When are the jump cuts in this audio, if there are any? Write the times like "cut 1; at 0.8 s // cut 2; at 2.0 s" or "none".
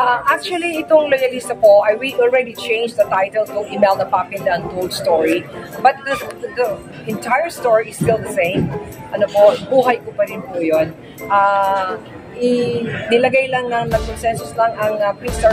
none